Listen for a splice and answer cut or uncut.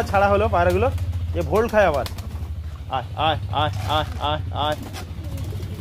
uncut